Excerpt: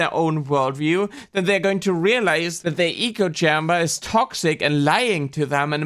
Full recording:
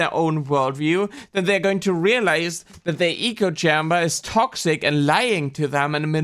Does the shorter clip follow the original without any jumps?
no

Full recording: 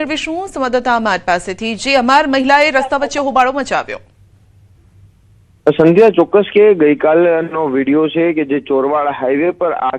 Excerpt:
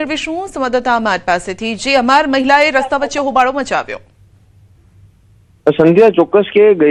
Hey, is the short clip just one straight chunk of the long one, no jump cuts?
yes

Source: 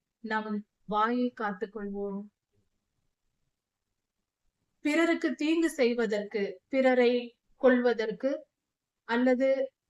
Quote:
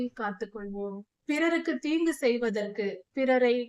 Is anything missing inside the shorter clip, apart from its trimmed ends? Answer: yes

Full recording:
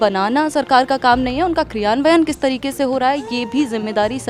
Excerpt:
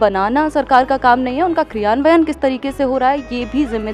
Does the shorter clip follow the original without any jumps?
yes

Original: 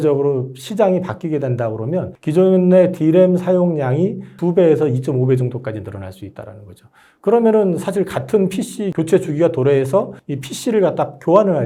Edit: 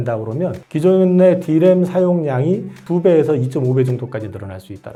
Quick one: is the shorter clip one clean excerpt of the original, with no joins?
yes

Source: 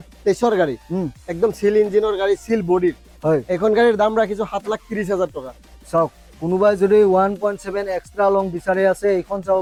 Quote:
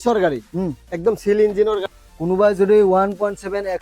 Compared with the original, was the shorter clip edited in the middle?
yes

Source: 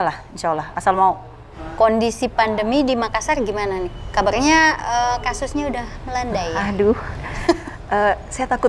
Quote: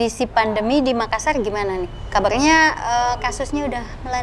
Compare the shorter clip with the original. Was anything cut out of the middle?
no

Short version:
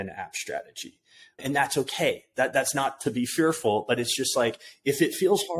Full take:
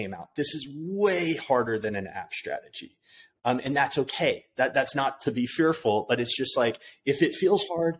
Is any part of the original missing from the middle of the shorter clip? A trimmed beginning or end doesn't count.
yes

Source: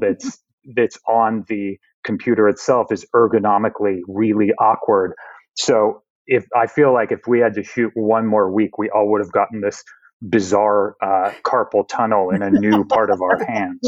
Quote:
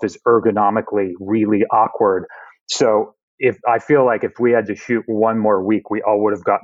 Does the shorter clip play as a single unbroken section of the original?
yes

